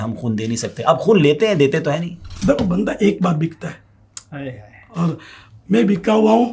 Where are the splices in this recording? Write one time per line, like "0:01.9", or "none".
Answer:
0:02.3